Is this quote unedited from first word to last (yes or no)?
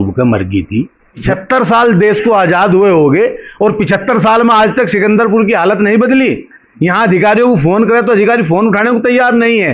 no